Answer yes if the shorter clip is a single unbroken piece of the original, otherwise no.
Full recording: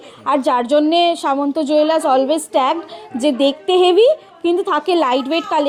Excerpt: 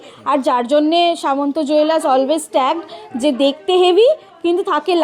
yes